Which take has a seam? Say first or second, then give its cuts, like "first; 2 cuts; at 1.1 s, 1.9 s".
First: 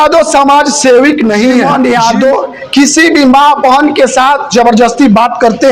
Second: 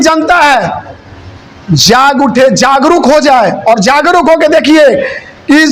first; 1 cut; at 1.6 s